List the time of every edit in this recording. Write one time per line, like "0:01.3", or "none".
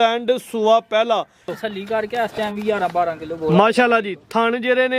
0:01.5